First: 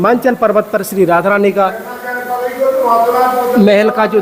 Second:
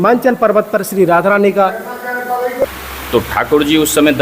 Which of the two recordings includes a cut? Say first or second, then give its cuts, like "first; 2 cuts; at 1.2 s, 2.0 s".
second; 1 cut; at 2.5 s